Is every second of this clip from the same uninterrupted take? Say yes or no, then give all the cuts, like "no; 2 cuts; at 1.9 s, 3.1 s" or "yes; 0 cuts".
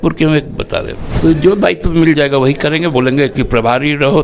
no; 1 cut; at 1.0 s